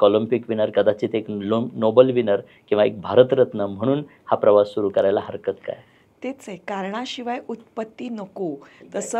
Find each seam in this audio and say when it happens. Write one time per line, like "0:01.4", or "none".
none